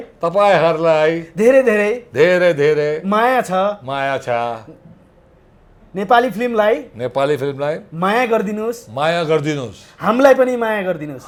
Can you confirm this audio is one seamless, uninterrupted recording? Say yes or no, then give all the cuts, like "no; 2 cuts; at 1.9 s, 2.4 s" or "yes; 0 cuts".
yes; 0 cuts